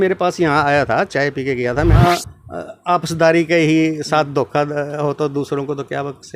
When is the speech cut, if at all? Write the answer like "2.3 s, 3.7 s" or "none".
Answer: 2.0 s